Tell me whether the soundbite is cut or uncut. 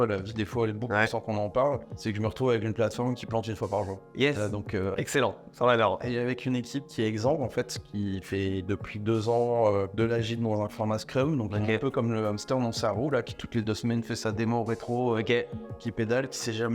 cut